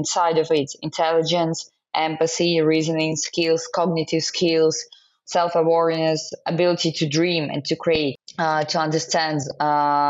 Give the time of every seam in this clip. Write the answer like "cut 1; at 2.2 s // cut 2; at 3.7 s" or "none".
cut 1; at 8.2 s